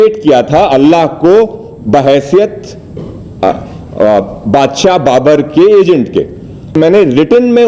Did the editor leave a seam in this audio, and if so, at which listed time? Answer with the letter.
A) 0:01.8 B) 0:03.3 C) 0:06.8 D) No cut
C